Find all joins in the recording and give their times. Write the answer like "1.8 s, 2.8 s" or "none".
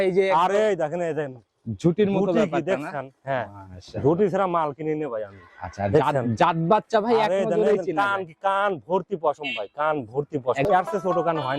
10.6 s

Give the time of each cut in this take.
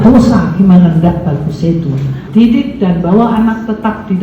2.1 s

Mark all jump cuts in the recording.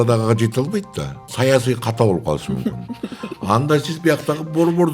1.2 s

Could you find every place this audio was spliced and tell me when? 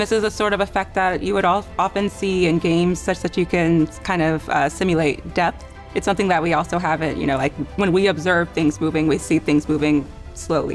none

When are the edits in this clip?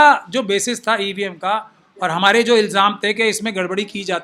none

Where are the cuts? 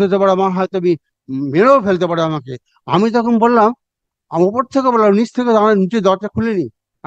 none

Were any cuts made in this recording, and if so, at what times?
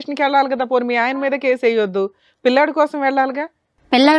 none

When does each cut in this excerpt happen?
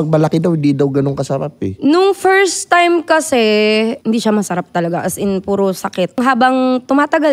4.0 s, 6.2 s

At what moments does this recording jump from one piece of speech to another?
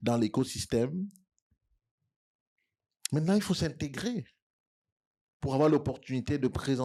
none

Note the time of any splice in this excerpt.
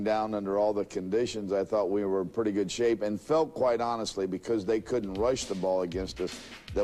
none

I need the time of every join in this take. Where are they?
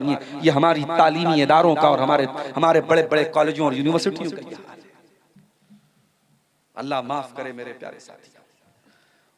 none

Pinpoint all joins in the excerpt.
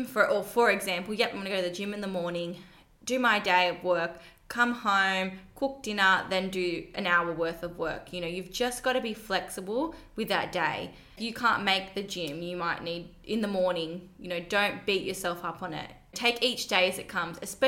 11.2 s

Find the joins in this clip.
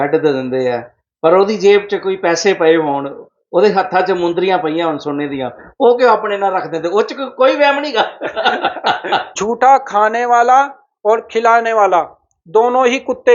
9.3 s

